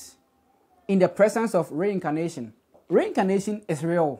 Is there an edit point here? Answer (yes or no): yes